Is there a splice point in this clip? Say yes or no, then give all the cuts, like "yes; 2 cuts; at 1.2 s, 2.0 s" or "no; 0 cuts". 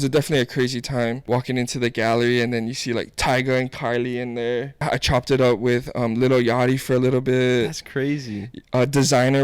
yes; 2 cuts; at 1.2 s, 4.8 s